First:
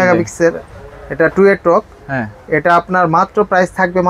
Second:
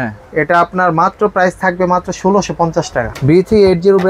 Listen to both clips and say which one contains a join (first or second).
second